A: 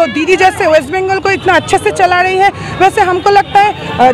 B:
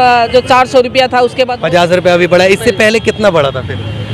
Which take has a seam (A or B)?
B